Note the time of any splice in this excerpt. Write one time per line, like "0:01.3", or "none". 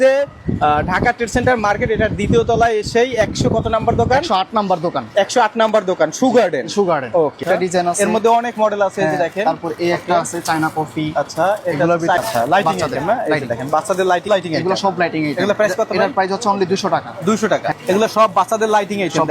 0:07.4
0:12.2
0:14.3
0:17.8